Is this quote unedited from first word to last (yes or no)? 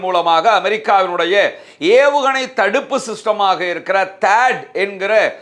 yes